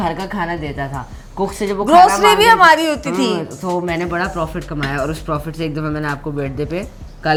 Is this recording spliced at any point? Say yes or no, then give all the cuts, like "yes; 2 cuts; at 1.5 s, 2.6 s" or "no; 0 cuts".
no; 0 cuts